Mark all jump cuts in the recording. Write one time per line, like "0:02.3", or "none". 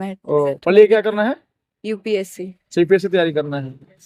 none